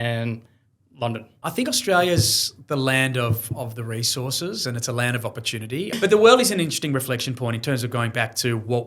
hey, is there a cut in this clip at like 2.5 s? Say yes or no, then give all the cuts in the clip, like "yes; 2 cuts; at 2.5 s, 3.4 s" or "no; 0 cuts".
no; 2 cuts; at 1.3 s, 5.9 s